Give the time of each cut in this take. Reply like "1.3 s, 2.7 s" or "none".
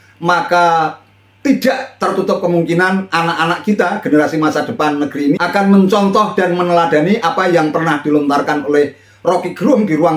5.4 s